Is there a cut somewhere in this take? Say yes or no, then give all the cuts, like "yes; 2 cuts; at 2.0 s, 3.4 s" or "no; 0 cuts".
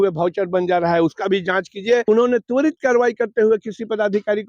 yes; 1 cut; at 2.1 s